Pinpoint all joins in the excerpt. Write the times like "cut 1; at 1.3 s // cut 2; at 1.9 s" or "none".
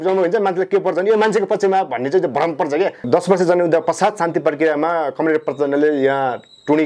cut 1; at 3.0 s